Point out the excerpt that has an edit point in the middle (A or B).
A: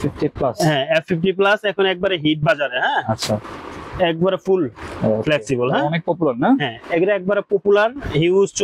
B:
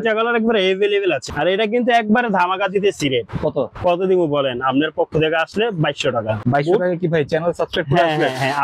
B